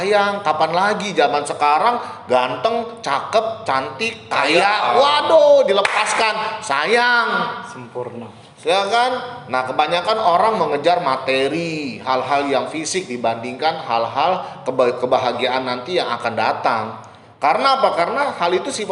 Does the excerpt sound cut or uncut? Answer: uncut